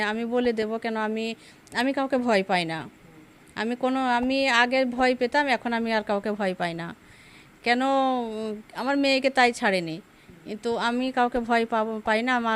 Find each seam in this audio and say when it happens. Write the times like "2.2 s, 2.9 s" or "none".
none